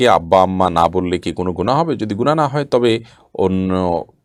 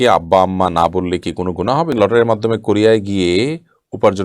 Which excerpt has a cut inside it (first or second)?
second